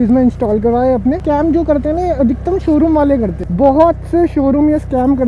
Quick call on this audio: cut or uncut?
cut